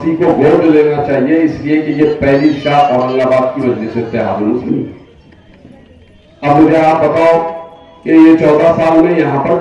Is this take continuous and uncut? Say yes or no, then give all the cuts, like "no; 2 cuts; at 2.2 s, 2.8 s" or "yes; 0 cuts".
yes; 0 cuts